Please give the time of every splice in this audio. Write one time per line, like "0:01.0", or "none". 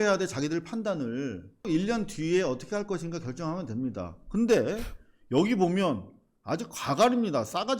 0:01.6